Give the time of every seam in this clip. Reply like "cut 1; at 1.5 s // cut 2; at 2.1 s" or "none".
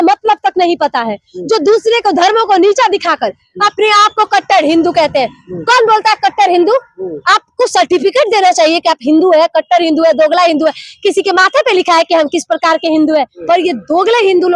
cut 1; at 13.4 s